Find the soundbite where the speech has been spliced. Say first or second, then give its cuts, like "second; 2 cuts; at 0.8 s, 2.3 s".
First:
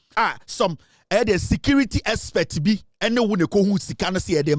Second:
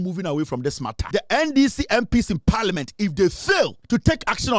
second; 2 cuts; at 1.0 s, 3.8 s